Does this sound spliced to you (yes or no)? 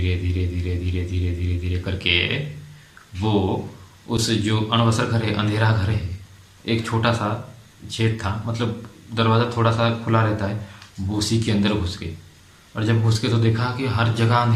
no